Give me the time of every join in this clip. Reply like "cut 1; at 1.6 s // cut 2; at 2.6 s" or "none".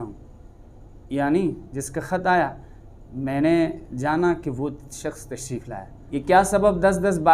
cut 1; at 6.0 s